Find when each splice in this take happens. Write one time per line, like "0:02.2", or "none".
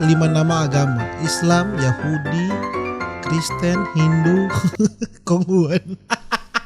none